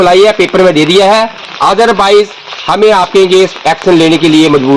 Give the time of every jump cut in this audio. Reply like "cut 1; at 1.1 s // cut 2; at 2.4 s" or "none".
cut 1; at 1.4 s